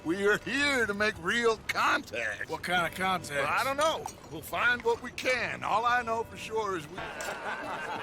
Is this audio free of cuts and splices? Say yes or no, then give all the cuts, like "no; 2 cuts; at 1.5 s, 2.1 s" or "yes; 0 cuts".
no; 1 cut; at 7.0 s